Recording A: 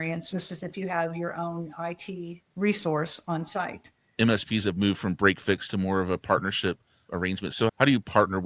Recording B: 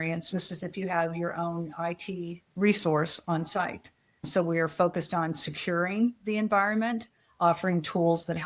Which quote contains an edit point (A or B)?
A